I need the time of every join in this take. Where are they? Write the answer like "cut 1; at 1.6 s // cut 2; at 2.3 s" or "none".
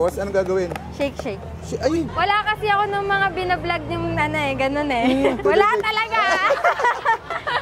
cut 1; at 2.1 s // cut 2; at 5.4 s